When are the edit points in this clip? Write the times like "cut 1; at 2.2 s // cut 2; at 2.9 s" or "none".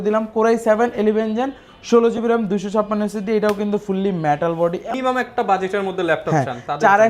cut 1; at 4.9 s